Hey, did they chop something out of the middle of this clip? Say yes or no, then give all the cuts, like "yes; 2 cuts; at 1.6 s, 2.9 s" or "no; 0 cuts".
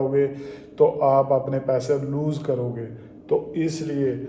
no; 0 cuts